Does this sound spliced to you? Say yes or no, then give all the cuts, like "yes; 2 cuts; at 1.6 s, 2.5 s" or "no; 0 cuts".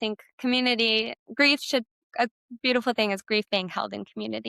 yes; 2 cuts; at 1.2 s, 2.0 s